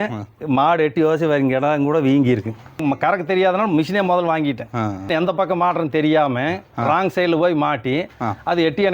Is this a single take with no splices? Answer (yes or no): no